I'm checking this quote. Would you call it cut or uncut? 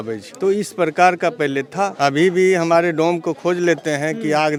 uncut